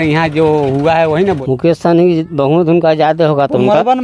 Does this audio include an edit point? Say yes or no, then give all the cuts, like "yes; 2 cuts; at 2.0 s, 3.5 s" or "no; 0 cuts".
yes; 1 cut; at 1.4 s